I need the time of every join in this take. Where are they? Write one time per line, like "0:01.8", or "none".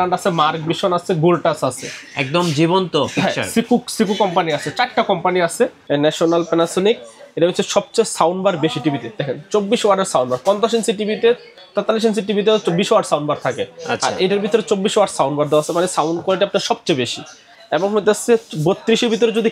0:05.8

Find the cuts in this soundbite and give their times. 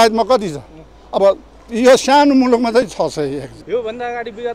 0:03.5

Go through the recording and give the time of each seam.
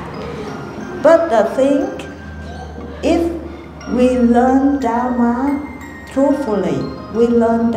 none

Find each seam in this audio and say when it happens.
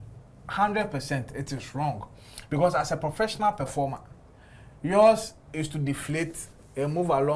none

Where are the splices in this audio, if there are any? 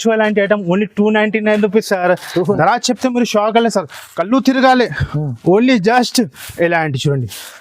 0:02.3
0:06.4

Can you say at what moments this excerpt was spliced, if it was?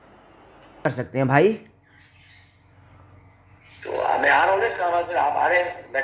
0:00.9

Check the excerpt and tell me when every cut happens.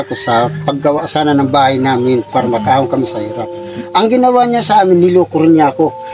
none

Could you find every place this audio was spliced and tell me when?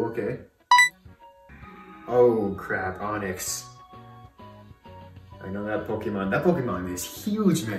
0:01.4

